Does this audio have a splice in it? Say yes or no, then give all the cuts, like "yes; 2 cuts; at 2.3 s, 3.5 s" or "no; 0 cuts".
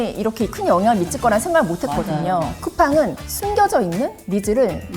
yes; 1 cut; at 2.6 s